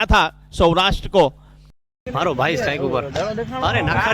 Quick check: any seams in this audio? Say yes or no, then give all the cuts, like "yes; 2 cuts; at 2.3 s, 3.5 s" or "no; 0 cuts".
yes; 1 cut; at 2.1 s